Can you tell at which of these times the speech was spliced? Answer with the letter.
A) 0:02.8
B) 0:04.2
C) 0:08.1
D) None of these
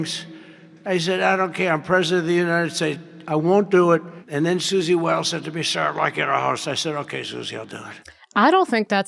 B